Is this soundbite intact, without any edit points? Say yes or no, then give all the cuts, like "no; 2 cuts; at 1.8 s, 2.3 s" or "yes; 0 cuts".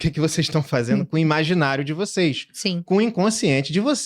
yes; 0 cuts